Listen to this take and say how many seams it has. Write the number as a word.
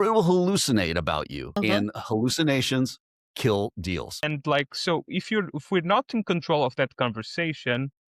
two